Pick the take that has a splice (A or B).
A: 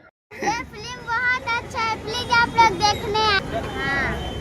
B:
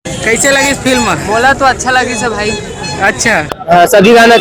A